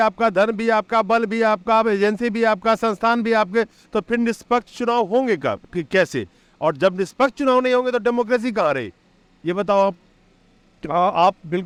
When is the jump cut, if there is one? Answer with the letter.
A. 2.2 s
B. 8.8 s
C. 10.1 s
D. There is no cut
D